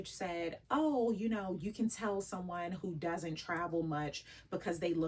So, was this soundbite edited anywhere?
no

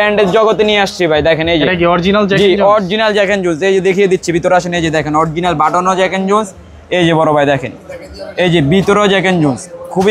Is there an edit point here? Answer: no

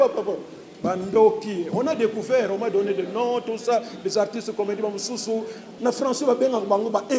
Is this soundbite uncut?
no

